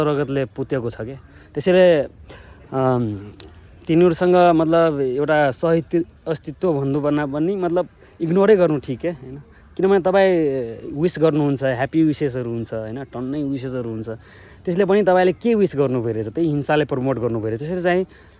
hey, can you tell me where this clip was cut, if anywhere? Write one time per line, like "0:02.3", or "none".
none